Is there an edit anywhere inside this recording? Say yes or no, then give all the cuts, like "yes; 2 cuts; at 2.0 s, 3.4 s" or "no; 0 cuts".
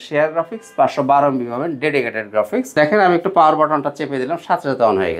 yes; 1 cut; at 2.7 s